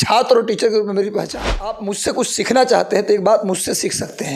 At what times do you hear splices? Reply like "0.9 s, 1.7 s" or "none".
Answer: 1.9 s